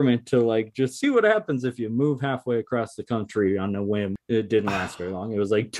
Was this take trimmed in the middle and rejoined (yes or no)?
yes